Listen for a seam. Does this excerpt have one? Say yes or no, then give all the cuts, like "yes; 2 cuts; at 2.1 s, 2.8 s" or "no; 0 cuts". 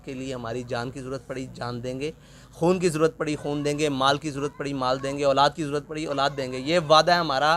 no; 0 cuts